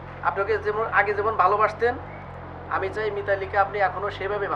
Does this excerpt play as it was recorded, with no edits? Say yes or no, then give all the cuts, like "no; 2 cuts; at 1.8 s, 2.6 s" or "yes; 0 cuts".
yes; 0 cuts